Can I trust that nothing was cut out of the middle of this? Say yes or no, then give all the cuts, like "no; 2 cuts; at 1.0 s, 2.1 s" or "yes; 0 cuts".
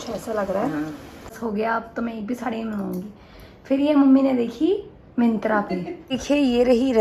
no; 2 cuts; at 1.4 s, 6.2 s